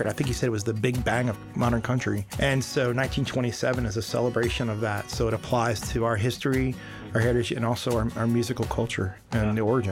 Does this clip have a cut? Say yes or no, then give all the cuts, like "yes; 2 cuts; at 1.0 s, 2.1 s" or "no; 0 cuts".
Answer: yes; 1 cut; at 2.3 s